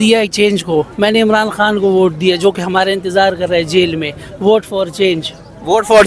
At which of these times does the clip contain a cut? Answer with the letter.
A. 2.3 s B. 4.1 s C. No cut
C